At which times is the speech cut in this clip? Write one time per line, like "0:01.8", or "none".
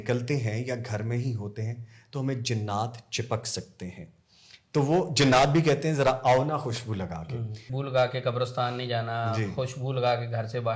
0:07.6